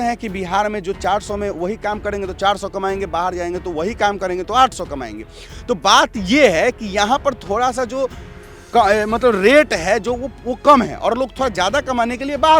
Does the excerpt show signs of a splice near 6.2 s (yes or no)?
no